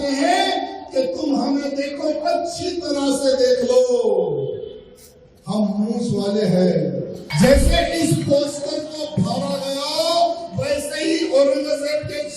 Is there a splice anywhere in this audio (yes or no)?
yes